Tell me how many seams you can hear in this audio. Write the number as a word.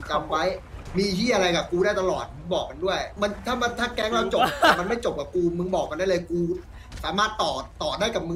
one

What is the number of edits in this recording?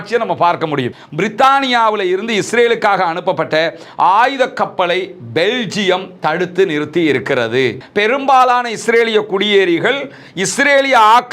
two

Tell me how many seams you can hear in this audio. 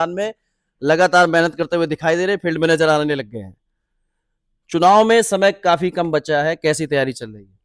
zero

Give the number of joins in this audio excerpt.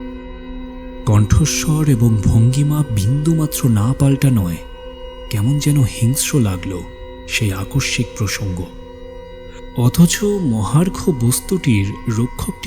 one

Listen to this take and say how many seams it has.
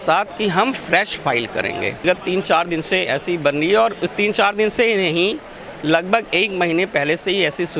one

